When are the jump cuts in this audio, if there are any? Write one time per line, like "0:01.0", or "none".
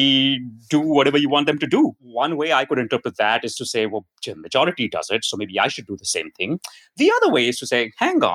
0:02.0